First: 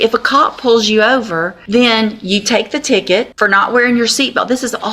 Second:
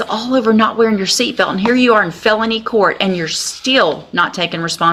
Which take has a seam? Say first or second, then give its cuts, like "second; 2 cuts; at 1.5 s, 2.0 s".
first; 2 cuts; at 1.5 s, 3.3 s